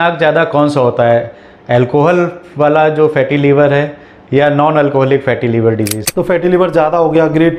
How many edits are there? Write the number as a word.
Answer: one